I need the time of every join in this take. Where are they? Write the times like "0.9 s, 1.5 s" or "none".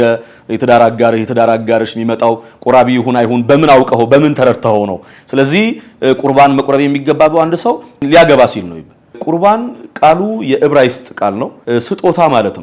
8.0 s, 9.2 s, 11.5 s